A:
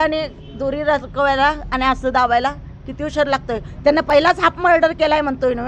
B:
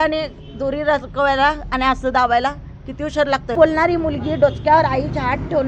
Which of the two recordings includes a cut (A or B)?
B